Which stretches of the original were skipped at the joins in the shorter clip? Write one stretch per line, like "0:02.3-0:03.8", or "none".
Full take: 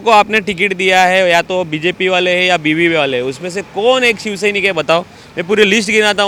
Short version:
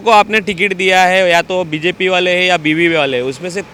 none